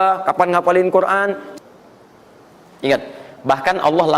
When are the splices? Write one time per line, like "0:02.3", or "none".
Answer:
0:01.5